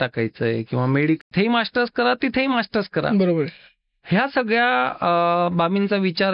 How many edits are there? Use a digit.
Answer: 1